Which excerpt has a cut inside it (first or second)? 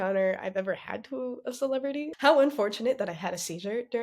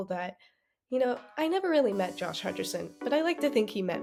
first